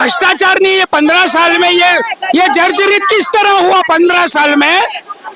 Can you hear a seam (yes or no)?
no